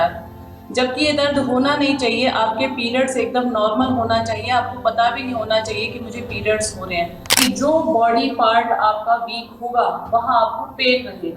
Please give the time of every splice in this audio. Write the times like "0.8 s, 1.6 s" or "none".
7.4 s

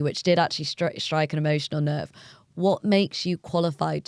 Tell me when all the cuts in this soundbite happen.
none

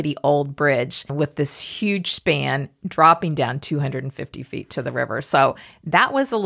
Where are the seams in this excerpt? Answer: 1.1 s

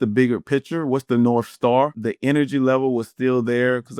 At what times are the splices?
2.0 s

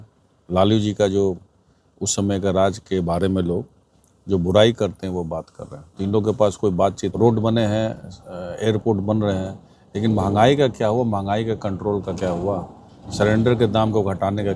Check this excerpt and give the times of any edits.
7.1 s

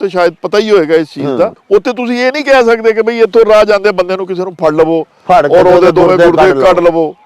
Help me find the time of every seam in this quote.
1.6 s

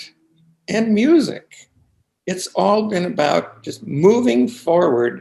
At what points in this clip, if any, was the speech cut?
none

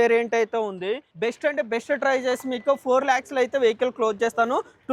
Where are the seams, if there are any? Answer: 1.1 s

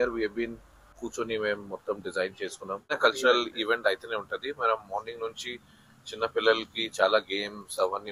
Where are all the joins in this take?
1.0 s, 3.0 s

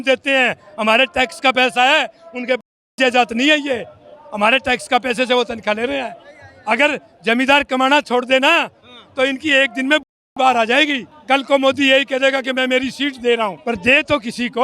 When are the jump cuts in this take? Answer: 11.1 s, 13.6 s

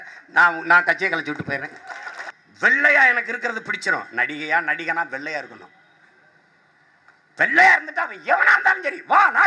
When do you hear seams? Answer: 2.3 s

